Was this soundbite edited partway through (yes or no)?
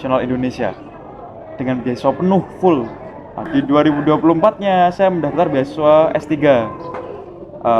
yes